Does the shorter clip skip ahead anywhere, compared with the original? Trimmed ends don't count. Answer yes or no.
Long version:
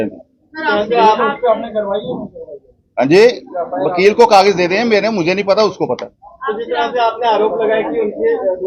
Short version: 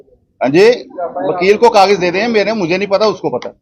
no